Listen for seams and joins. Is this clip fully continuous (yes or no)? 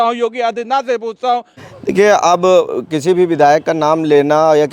no